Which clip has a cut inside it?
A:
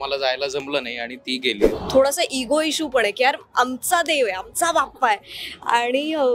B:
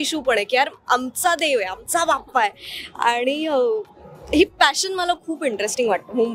A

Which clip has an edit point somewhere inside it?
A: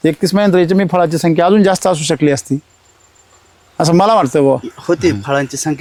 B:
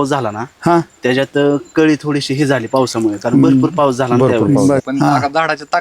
B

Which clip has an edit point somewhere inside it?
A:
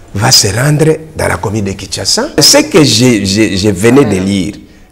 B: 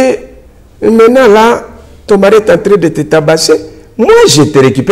A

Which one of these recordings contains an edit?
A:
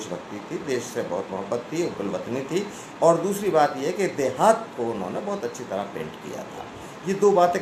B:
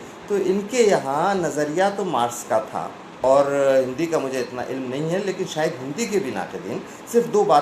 B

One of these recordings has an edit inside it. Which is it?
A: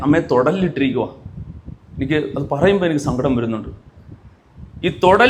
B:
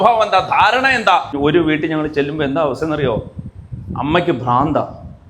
B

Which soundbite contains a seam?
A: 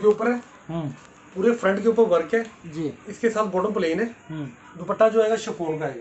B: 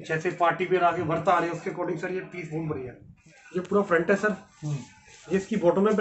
B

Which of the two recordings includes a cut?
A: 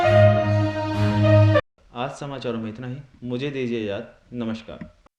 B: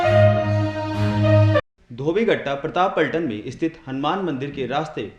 B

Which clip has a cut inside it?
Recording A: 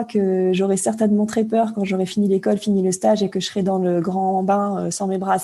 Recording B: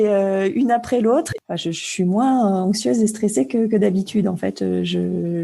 B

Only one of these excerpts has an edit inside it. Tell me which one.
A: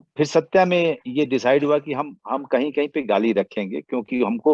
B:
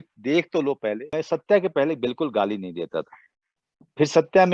B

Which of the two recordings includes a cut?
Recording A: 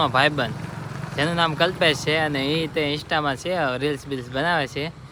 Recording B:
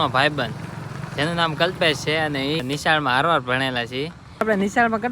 B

